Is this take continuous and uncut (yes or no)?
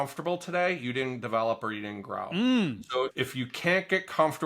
no